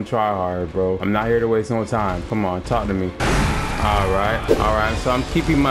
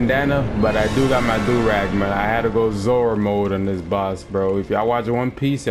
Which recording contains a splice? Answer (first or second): first